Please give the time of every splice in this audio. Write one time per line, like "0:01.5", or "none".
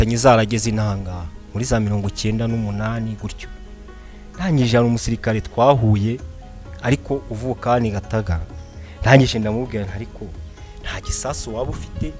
none